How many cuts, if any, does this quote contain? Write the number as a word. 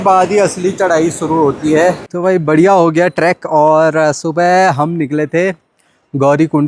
one